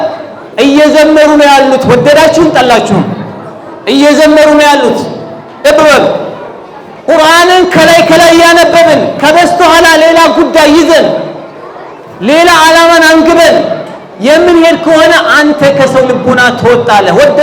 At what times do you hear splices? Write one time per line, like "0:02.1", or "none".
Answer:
0:05.6